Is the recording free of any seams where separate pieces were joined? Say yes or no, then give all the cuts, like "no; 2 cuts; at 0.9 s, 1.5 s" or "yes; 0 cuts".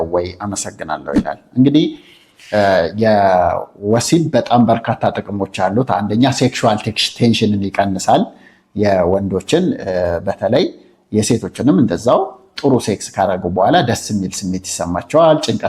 yes; 0 cuts